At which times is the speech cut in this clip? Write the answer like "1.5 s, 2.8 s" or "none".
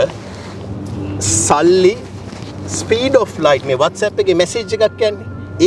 none